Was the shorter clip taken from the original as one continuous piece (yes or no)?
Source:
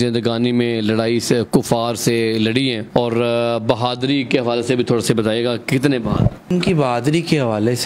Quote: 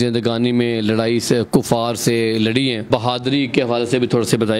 no